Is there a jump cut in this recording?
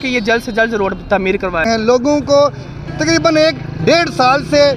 yes; 1 cut; at 1.7 s

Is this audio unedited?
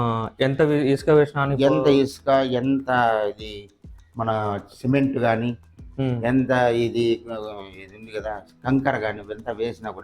yes; 0 cuts

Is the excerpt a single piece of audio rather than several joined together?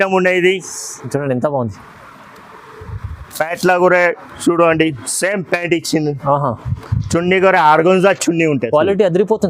yes; 0 cuts

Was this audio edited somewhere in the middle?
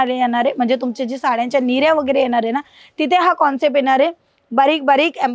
no; 0 cuts

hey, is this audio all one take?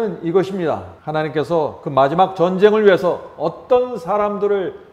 no; 1 cut; at 0.9 s

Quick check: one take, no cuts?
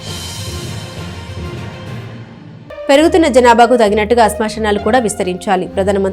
no; 1 cut; at 2.4 s

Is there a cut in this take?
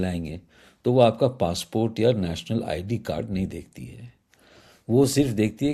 no; 0 cuts

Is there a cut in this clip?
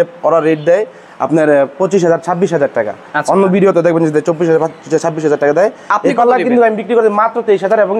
no; 0 cuts

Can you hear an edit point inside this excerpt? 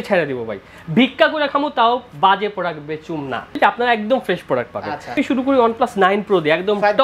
yes; 1 cut; at 5.2 s

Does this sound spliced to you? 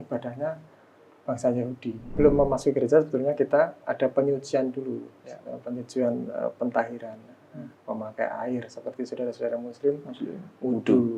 yes; 1 cut; at 2.1 s

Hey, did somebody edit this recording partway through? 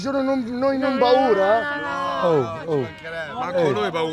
no; 0 cuts

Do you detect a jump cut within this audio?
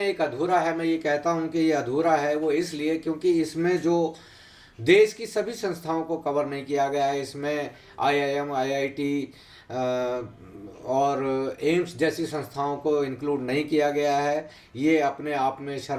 no; 0 cuts

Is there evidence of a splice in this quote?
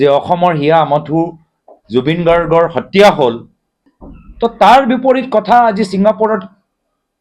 no; 0 cuts

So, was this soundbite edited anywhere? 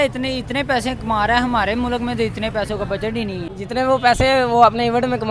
yes; 1 cut; at 3.5 s

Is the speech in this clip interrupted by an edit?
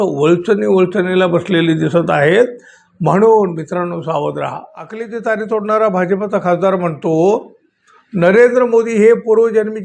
yes; 1 cut; at 5.0 s

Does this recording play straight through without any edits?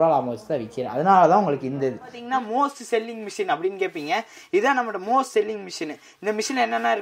no; 1 cut; at 2.2 s

